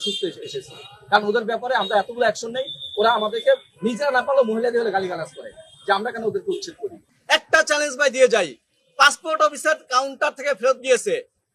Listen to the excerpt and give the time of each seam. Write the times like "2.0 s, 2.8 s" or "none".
7.1 s

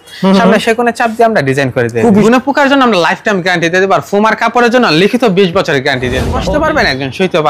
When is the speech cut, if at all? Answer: 2.2 s, 6.4 s

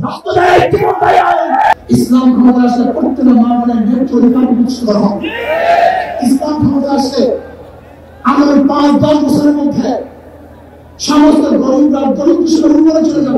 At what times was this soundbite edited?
1.8 s

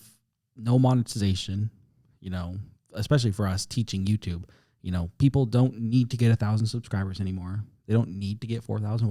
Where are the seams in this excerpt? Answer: none

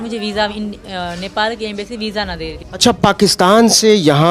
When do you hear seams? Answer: 2.6 s

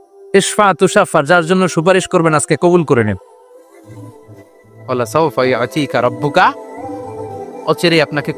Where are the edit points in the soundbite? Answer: 3.3 s, 4.9 s

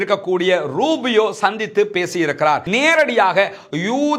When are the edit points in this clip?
2.7 s

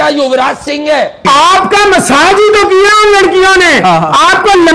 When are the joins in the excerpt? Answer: 1.2 s

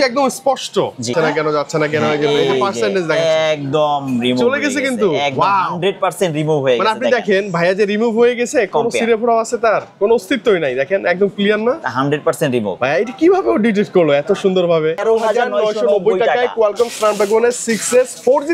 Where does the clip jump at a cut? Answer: 1.1 s, 12.7 s, 15.0 s

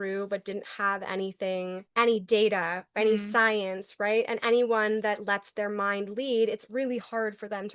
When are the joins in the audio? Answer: 1.8 s

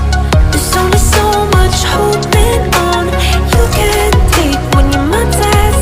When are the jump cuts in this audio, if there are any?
none

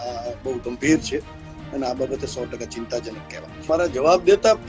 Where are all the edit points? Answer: 3.7 s

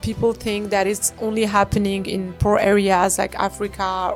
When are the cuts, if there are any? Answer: none

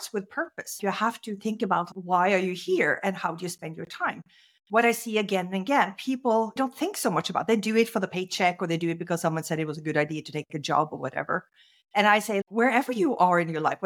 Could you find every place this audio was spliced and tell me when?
0.8 s, 1.9 s, 6.6 s

